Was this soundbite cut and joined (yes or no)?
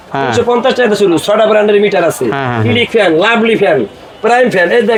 no